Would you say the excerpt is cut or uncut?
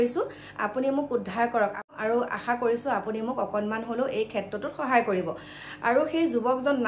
cut